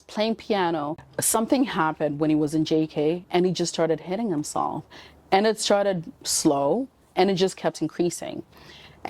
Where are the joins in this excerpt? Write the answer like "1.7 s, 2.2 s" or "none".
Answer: 0.9 s